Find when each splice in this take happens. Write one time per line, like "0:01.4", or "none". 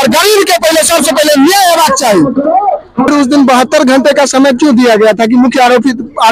0:03.1